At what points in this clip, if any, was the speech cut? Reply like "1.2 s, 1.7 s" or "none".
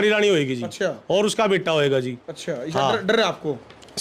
none